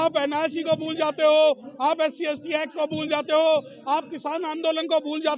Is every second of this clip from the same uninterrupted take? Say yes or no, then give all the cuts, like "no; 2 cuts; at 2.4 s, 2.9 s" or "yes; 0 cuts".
yes; 0 cuts